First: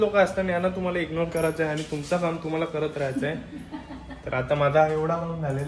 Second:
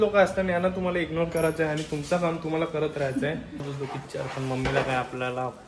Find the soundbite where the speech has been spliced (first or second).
second